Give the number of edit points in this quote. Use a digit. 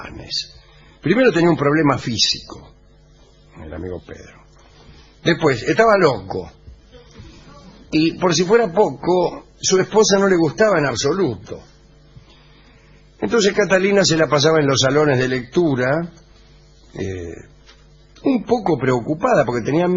1